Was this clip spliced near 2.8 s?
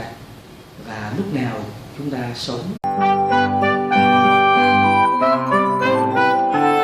no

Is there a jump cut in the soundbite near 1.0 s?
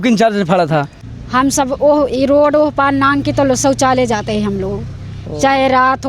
yes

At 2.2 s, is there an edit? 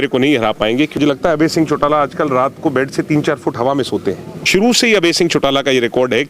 no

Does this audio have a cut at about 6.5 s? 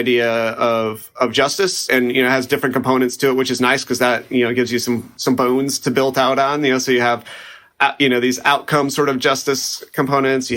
no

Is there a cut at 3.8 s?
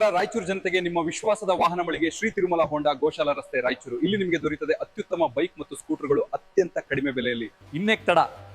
no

